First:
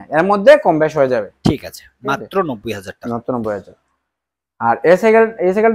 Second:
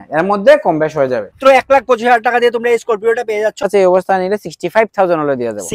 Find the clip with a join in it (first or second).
second